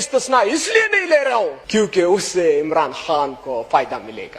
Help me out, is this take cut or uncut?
cut